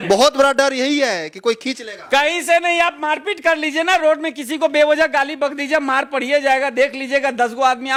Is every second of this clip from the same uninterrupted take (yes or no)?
yes